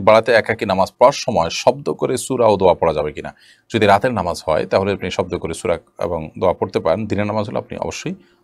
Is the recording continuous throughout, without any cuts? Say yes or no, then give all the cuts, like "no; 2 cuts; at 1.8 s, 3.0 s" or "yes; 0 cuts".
yes; 0 cuts